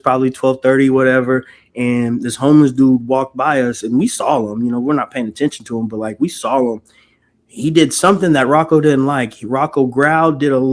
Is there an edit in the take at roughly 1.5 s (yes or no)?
no